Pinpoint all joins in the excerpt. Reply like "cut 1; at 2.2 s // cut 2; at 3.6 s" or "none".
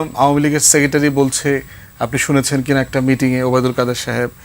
none